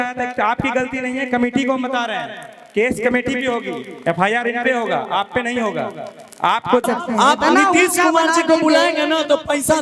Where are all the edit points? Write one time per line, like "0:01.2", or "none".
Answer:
0:06.8